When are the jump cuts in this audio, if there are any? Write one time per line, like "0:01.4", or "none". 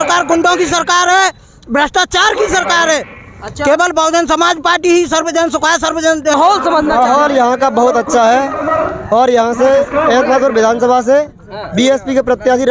0:06.4